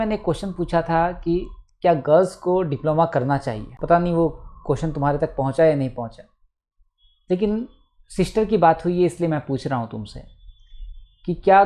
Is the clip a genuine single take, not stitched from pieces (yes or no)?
yes